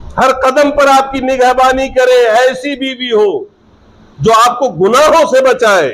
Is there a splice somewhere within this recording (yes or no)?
no